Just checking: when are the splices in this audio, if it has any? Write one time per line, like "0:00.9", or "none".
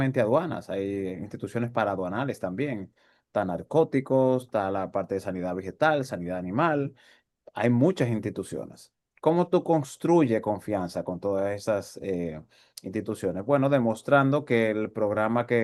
none